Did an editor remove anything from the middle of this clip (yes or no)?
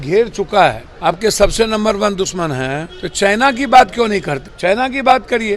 yes